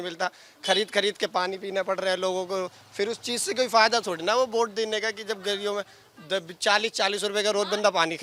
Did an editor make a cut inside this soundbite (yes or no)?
no